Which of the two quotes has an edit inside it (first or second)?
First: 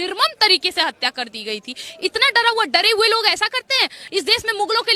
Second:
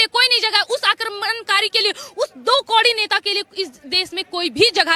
first